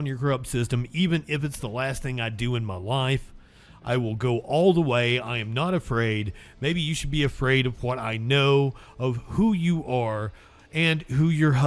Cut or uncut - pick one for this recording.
uncut